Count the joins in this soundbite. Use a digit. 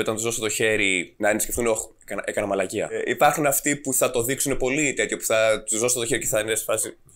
2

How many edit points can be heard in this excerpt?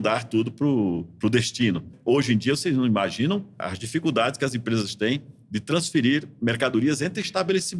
2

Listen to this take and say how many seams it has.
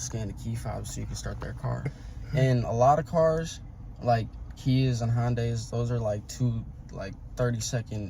1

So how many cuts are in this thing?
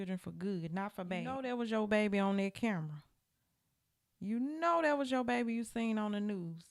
1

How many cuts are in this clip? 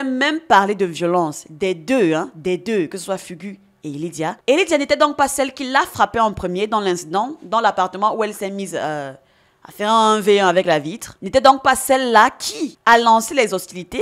0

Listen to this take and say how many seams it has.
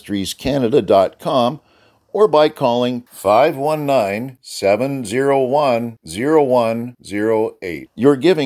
0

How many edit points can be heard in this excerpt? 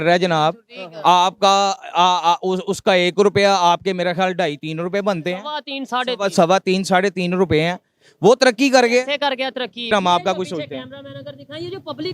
1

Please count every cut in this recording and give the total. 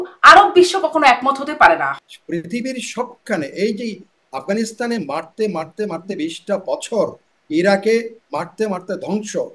1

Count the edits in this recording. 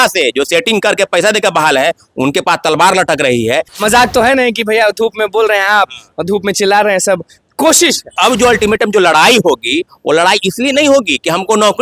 2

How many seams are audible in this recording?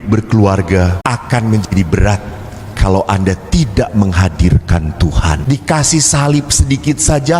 2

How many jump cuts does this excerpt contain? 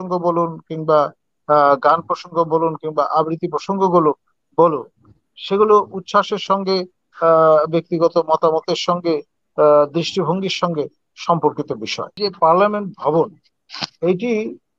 1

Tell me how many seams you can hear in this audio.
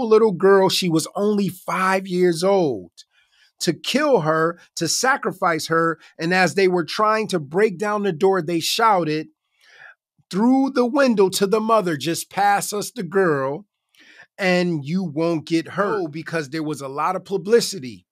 1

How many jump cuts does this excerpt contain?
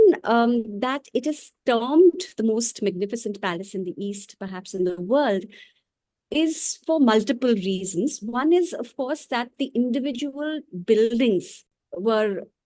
0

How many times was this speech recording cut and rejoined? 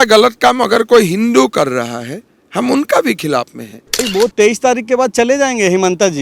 1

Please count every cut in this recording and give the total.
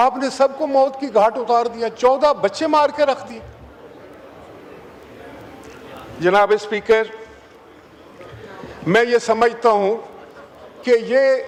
0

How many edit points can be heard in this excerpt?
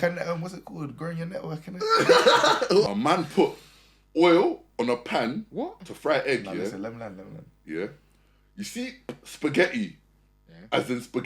1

